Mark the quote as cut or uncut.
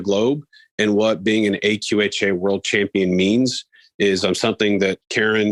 uncut